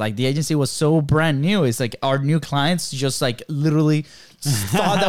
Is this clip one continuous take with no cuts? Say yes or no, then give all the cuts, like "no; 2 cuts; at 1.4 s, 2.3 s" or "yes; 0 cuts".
yes; 0 cuts